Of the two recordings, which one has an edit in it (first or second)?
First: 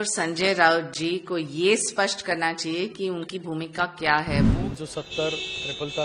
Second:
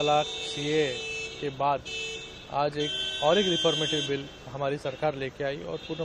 first